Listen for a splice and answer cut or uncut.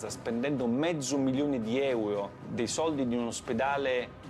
cut